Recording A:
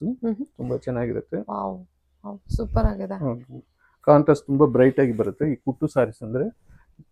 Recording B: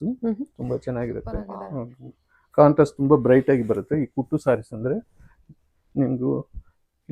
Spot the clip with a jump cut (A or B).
B